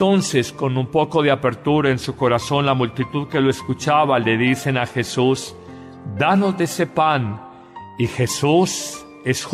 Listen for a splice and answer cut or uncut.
uncut